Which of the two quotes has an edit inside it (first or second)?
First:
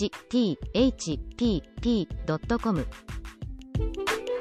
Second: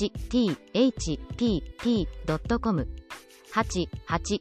second